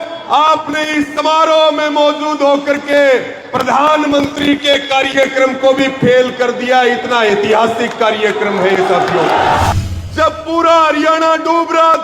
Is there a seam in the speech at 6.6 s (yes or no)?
no